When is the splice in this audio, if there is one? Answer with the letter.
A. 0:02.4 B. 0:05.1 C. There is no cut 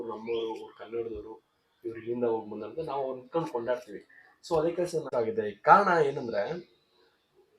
B